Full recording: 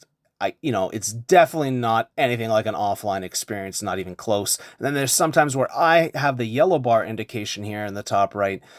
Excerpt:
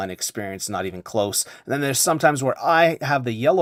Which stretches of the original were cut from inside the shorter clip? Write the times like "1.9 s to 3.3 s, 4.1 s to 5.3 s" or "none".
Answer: none